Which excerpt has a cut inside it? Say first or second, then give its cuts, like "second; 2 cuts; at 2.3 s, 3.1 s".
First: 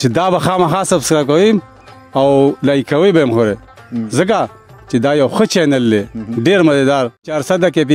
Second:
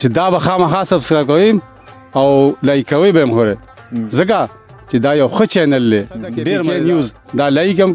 second; 1 cut; at 6.6 s